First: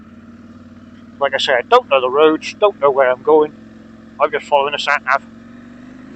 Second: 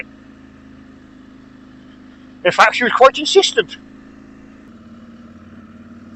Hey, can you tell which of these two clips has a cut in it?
second; 1 cut; at 4.7 s

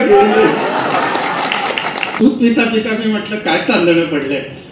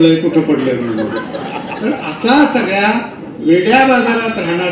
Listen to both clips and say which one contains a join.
first; 1 cut; at 2.2 s

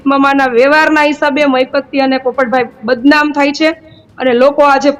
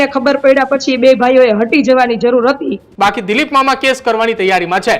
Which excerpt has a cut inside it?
second; 1 cut; at 2.8 s

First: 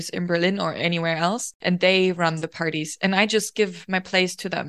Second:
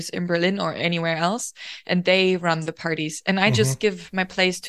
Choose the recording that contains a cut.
first; 1 cut; at 1.5 s

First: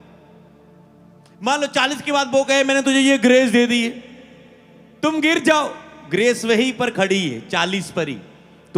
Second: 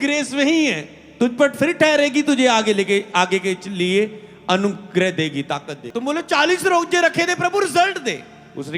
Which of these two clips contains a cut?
second; 1 cut; at 5.8 s

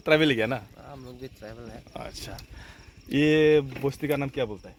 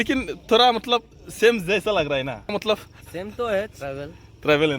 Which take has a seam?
second; 1 cut; at 2.5 s

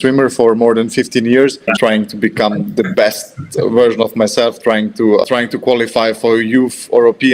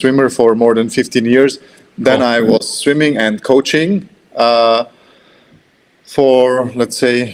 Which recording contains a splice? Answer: first; 2 cuts; at 1.7 s, 5.2 s

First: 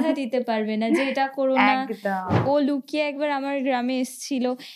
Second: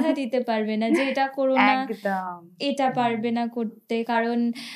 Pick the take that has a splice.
first; 1 cut; at 2.4 s

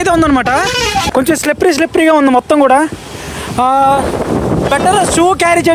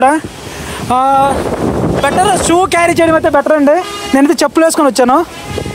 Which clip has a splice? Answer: first; 1 cut; at 1.1 s

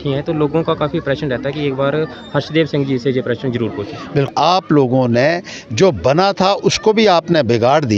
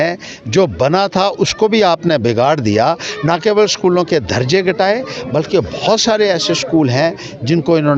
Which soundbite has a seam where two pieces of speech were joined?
first; 1 cut; at 4.3 s

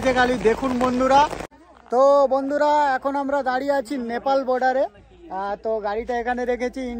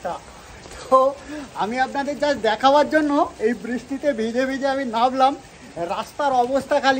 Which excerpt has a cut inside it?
first; 1 cut; at 1.6 s

